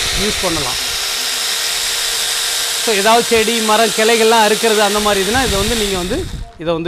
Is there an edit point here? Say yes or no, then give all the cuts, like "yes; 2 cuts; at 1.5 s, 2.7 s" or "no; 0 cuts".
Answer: no; 0 cuts